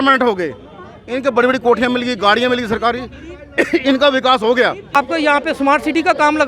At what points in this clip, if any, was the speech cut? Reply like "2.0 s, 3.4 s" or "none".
5.0 s

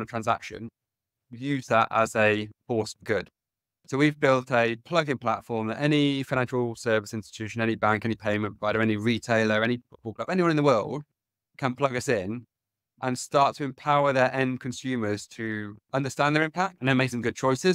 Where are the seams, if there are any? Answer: 16.8 s

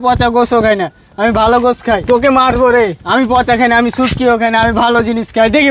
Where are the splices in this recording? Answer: 2.0 s

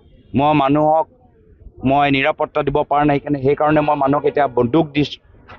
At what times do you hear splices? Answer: none

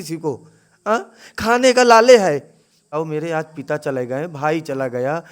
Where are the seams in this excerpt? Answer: 2.9 s

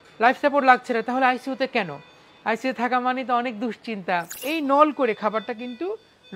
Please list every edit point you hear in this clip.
4.4 s

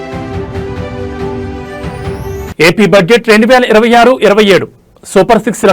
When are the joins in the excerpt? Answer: 1.4 s

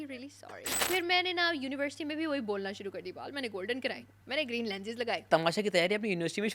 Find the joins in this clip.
0.8 s, 4.1 s, 5.3 s

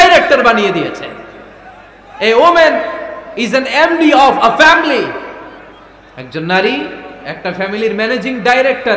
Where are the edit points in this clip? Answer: none

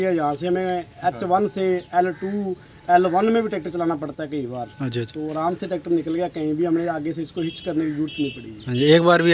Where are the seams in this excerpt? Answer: none

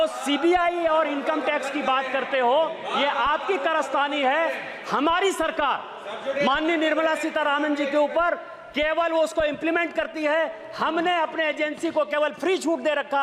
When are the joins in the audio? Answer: none

